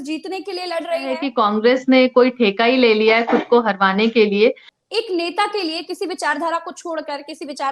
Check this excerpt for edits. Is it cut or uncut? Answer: cut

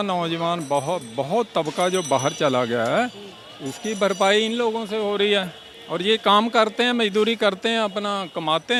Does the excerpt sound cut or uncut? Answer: uncut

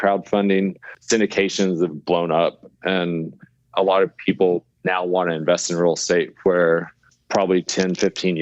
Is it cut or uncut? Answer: uncut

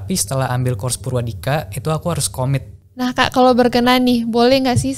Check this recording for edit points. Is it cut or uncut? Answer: cut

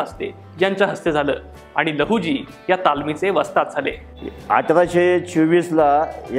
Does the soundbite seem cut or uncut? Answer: uncut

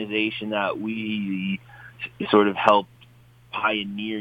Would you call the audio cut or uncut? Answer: uncut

